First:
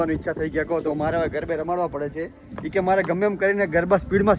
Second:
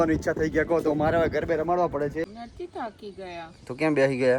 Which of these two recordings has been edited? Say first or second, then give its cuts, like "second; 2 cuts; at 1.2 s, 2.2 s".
second; 1 cut; at 2.4 s